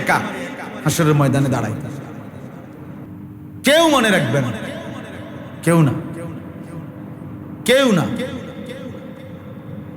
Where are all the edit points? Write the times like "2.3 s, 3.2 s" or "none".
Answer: 3.1 s